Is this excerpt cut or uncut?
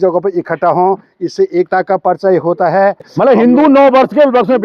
cut